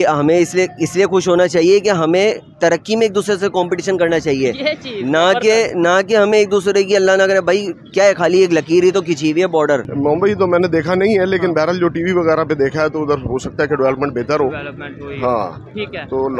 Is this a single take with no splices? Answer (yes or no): no